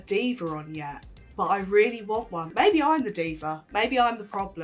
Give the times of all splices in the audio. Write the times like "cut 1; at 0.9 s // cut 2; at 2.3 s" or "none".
cut 1; at 2.5 s